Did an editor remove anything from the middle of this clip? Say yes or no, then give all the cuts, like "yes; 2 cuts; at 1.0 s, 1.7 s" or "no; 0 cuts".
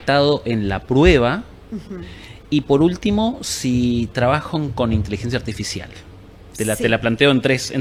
no; 0 cuts